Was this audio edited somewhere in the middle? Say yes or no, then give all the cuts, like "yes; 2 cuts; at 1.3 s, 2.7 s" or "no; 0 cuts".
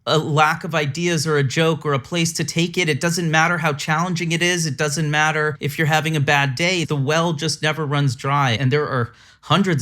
yes; 3 cuts; at 5.6 s, 6.9 s, 8.6 s